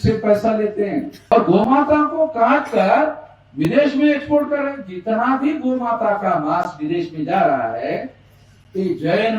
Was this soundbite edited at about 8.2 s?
no; 1 cut; at 1.3 s

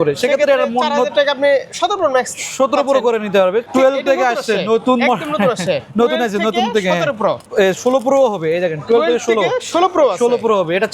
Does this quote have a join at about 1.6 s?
no; 2 cuts; at 3.7 s, 7.5 s

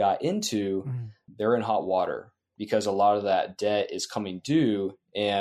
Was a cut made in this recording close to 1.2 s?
yes; 1 cut; at 1.2 s

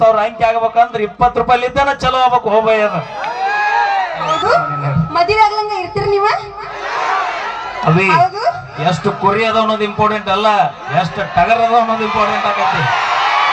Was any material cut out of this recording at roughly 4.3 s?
yes; 1 cut; at 4.3 s

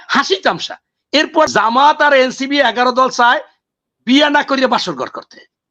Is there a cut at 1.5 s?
yes; 1 cut; at 1.5 s

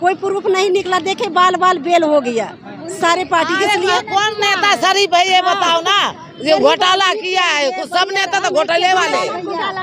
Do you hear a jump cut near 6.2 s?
no; 0 cuts

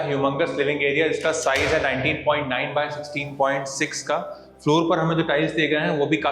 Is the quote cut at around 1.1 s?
no; 0 cuts

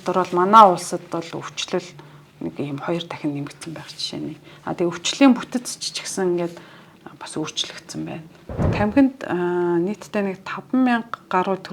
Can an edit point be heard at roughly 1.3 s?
no; 1 cut; at 8.7 s

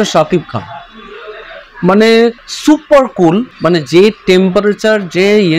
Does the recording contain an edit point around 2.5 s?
yes; 2 cuts; at 2.5 s, 3.5 s

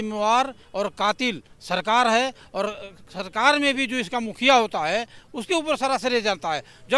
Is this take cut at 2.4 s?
no; 0 cuts

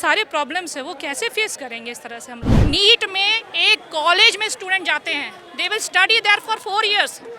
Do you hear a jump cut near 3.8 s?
no; 1 cut; at 2.5 s

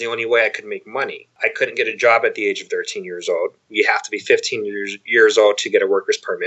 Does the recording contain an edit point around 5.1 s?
no; 1 cut; at 1.3 s

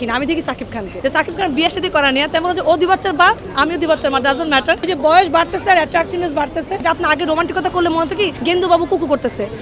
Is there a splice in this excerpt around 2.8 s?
no; 4 cuts; at 0.9 s, 4.8 s, 6.8 s, 8.4 s

